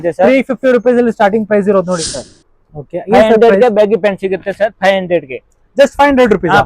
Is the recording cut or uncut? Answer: cut